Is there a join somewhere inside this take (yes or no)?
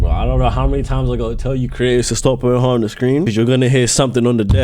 yes